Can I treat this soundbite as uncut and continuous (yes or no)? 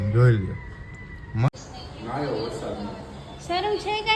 no